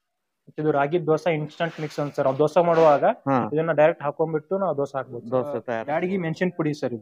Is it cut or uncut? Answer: cut